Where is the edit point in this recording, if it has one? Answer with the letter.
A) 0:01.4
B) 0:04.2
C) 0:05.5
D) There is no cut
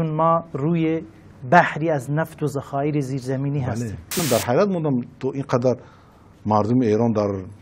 B